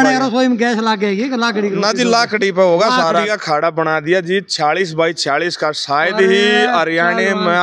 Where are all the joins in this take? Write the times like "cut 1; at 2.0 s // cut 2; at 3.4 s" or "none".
cut 1; at 3.3 s